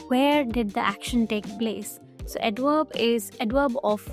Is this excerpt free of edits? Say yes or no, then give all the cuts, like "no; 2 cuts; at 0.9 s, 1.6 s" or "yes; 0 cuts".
yes; 0 cuts